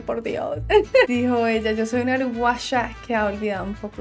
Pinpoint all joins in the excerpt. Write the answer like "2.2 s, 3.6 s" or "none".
1.1 s